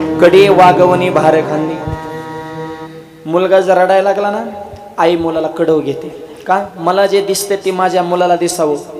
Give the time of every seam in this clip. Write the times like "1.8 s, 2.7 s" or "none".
none